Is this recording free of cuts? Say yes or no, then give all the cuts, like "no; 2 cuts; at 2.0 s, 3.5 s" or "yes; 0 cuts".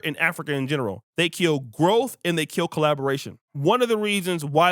no; 2 cuts; at 1.0 s, 3.4 s